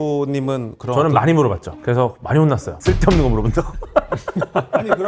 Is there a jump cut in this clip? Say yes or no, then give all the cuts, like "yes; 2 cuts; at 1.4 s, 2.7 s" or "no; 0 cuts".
no; 0 cuts